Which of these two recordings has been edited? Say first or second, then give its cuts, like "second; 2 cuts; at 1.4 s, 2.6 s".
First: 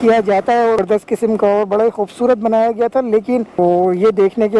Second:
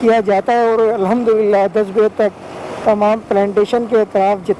first; 2 cuts; at 0.8 s, 3.6 s